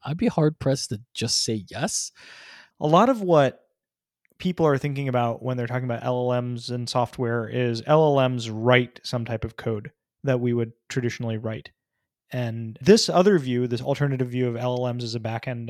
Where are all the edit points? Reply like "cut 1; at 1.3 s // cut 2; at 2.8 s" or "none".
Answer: cut 1; at 2.8 s // cut 2; at 12.8 s